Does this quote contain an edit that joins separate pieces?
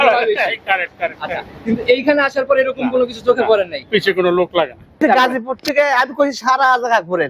yes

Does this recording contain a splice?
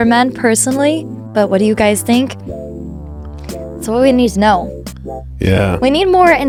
no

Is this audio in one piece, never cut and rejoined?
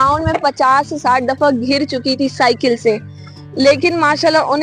yes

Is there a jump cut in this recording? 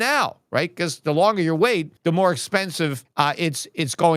yes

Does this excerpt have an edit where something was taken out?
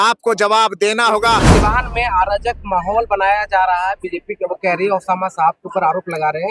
yes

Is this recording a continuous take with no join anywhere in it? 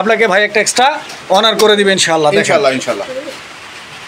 yes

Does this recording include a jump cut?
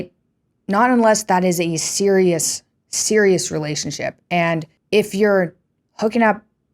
yes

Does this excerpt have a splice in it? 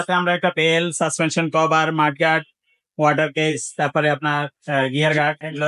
no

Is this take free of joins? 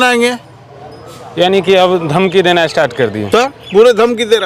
yes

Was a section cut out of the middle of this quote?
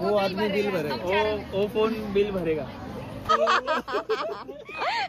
yes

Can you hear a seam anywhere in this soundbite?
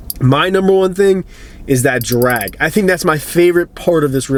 no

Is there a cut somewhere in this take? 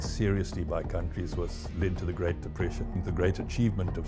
no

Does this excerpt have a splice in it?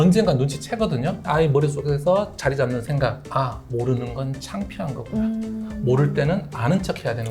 yes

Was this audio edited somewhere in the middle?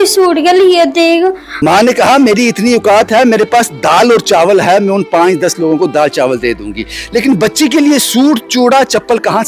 yes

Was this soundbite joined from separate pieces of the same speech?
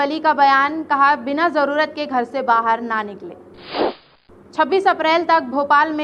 yes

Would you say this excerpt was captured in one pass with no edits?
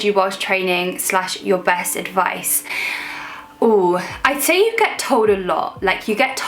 yes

